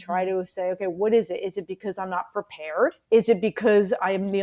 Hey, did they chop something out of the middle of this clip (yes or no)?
yes